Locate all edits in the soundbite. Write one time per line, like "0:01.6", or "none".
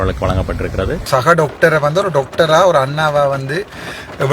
0:01.1

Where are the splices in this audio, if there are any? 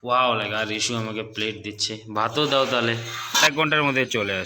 0:03.4

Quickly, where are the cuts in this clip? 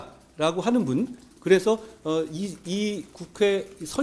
none

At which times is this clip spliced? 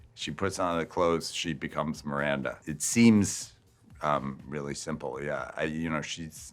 none

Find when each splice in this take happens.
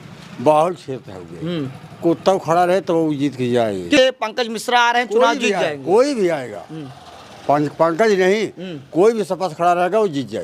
0:04.0

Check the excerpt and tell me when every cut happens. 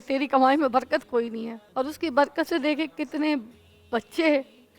0:01.6

